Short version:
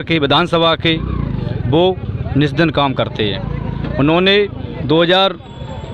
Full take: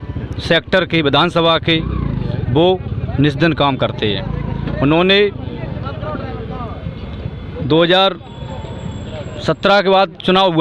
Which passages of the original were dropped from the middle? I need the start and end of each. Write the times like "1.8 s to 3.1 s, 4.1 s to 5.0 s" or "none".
5.5 s to 7.5 s